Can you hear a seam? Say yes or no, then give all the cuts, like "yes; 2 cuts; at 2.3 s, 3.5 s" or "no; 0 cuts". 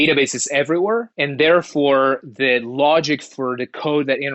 yes; 1 cut; at 1.2 s